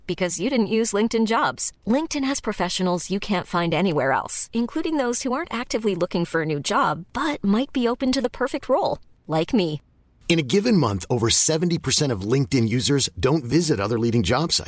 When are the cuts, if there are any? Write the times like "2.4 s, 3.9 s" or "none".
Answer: none